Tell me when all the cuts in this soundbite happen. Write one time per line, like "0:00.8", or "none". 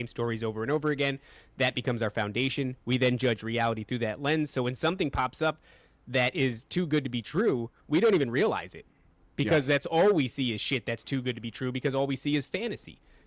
none